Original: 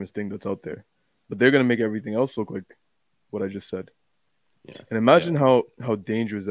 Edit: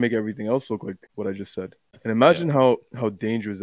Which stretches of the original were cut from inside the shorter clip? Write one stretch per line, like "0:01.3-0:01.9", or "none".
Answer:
0:02.7-0:03.2
0:04.0-0:04.7